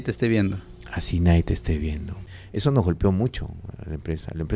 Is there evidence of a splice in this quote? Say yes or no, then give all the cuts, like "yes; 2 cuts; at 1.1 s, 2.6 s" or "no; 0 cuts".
yes; 1 cut; at 2.3 s